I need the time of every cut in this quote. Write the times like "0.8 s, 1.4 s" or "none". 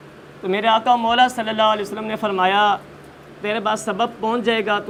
none